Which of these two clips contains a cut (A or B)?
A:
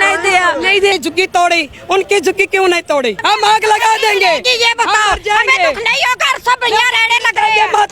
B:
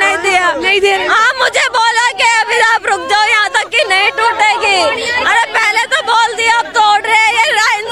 A